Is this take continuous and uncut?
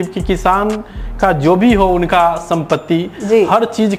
yes; 0 cuts

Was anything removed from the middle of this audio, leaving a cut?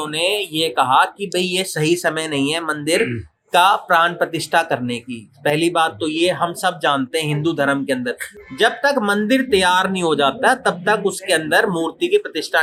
no; 0 cuts

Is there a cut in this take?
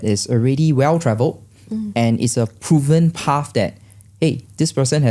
no; 0 cuts

